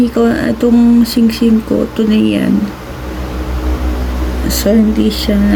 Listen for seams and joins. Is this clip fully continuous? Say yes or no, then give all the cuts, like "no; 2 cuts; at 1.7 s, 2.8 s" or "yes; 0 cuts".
yes; 0 cuts